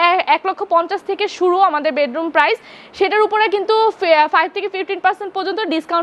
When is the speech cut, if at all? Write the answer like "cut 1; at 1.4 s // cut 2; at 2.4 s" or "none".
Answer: none

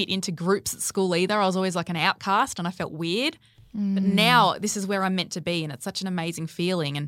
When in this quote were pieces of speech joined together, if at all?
none

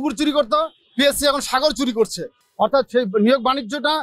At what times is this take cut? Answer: none

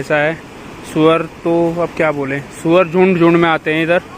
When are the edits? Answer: none

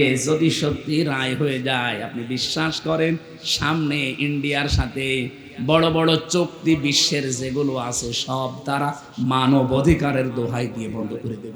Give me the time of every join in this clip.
none

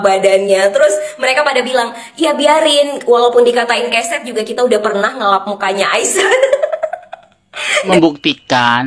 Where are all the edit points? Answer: cut 1; at 7.9 s

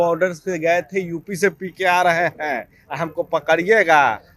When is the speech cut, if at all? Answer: none

